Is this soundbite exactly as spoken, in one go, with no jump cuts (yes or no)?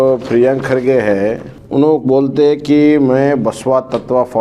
no